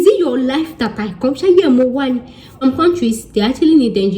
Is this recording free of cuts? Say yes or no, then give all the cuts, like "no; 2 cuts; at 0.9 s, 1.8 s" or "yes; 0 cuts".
no; 1 cut; at 2.6 s